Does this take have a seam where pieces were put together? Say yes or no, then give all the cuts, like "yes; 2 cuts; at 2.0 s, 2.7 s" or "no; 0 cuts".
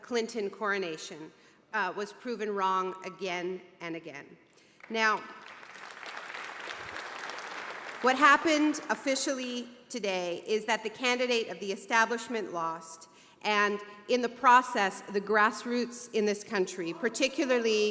no; 0 cuts